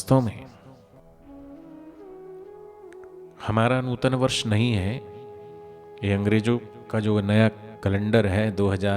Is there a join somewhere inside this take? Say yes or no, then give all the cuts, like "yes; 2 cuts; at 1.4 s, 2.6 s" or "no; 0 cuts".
yes; 1 cut; at 1.0 s